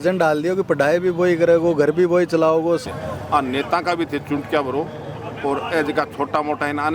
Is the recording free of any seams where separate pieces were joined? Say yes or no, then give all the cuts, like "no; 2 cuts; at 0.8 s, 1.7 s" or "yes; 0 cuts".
no; 1 cut; at 2.8 s